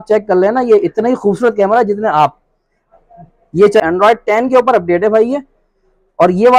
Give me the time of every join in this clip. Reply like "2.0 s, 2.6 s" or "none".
3.8 s